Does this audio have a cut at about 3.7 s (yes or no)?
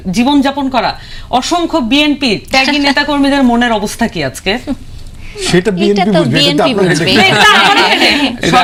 no